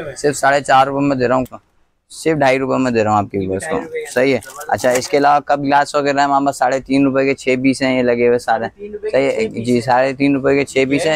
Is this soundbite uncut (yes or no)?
no